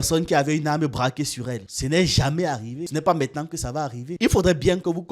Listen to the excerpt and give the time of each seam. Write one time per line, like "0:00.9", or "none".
none

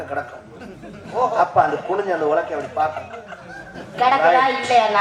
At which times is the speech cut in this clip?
none

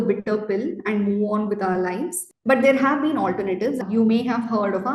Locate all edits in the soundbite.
0:02.3
0:03.8

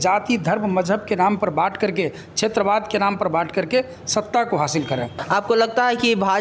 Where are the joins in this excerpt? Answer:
0:05.2

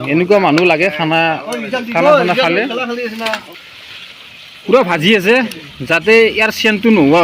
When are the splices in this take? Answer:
0:03.5

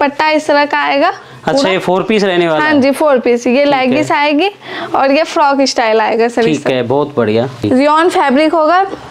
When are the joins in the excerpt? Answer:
0:07.6

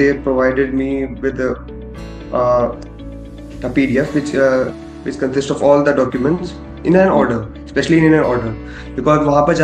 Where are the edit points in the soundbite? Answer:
none

